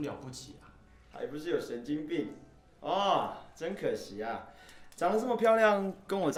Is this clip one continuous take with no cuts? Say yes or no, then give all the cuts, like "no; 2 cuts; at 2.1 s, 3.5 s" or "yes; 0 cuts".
yes; 0 cuts